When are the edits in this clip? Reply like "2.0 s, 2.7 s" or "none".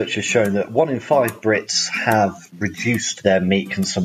3.1 s

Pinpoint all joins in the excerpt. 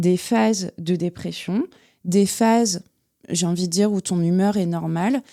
none

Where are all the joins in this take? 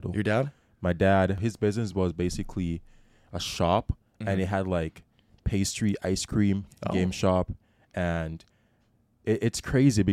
1.4 s

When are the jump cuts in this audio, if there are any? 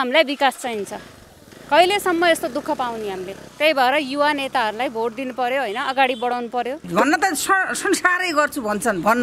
3.4 s, 6.8 s

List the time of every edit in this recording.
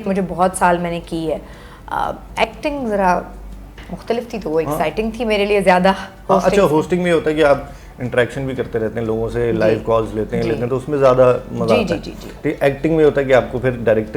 none

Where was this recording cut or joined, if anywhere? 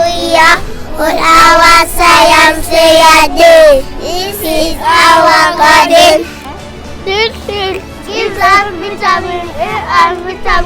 7.9 s

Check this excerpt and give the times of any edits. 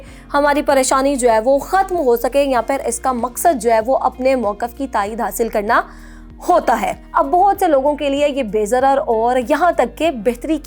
6.9 s

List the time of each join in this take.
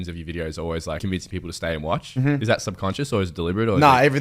1.0 s, 2.4 s

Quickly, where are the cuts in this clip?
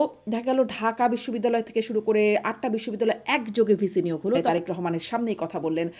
4.4 s

